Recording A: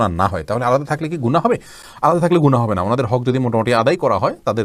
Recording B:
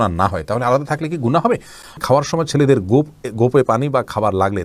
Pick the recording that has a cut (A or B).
B